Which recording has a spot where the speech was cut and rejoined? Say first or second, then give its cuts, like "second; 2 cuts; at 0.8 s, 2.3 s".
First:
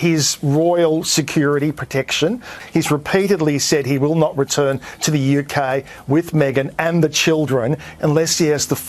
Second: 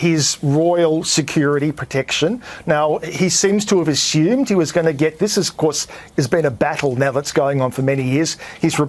first; 1 cut; at 2.5 s